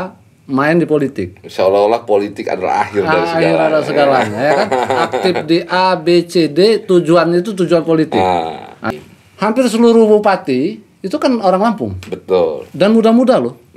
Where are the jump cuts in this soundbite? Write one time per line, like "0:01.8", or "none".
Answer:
0:08.9